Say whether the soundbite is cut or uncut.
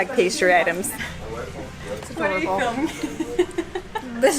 uncut